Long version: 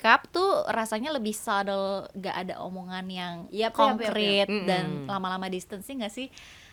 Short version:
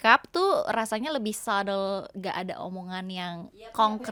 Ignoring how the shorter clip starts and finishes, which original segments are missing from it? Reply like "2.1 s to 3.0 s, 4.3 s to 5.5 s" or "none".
none